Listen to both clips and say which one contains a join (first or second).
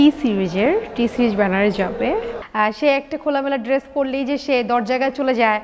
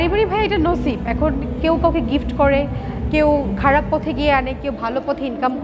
first